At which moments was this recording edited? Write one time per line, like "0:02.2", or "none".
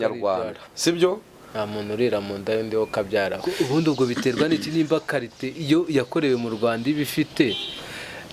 0:03.5